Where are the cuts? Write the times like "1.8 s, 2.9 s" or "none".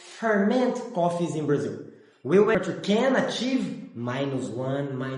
2.5 s